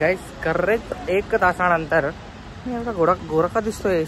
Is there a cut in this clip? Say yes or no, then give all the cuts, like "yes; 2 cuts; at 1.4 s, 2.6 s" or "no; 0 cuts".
no; 0 cuts